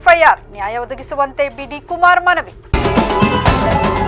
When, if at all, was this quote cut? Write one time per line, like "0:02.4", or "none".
0:02.6